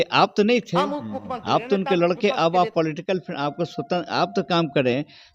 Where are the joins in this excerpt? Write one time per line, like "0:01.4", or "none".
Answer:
none